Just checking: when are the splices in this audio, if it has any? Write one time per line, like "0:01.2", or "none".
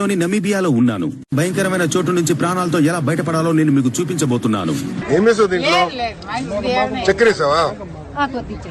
0:05.0